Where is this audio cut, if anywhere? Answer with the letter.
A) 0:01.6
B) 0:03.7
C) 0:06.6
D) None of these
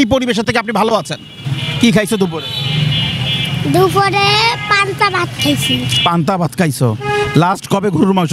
A